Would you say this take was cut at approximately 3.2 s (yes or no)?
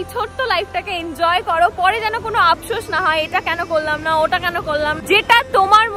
no